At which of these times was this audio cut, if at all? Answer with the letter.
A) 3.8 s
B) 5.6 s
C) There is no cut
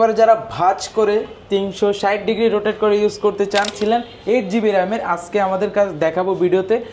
A